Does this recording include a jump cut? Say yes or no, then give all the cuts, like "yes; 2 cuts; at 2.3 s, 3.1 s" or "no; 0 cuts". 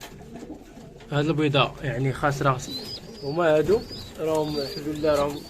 yes; 1 cut; at 2.7 s